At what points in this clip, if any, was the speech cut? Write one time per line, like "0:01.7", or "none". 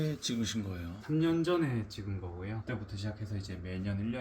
0:02.6